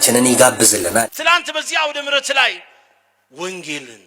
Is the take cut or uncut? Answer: cut